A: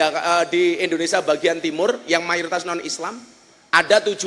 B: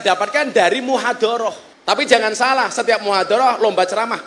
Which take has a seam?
B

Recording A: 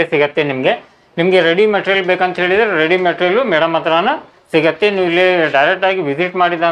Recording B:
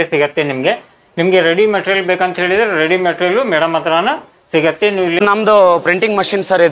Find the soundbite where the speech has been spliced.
B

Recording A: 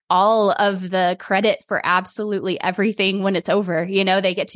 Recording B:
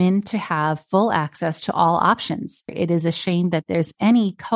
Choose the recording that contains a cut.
B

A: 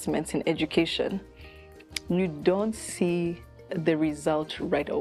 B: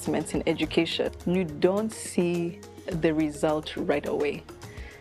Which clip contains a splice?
B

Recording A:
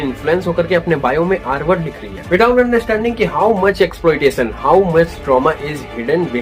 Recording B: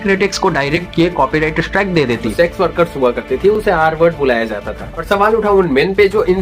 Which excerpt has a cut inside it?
B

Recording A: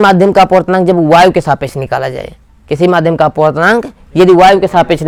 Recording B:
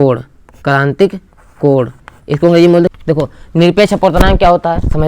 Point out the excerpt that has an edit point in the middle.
B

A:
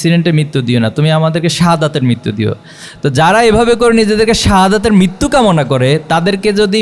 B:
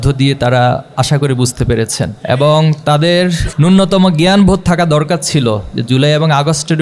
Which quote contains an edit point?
B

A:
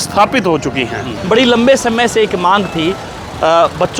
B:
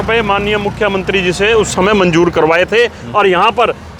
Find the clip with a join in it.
A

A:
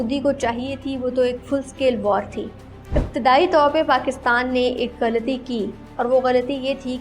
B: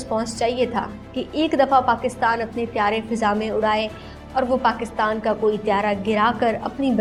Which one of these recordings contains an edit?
A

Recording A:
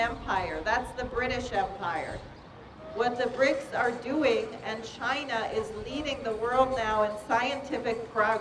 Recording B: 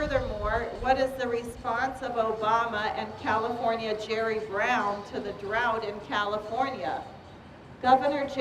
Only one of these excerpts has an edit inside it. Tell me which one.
B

